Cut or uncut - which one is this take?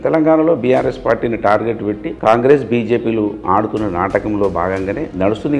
uncut